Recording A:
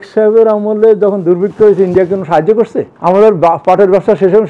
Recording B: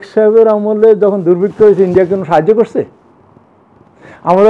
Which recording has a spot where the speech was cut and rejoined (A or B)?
A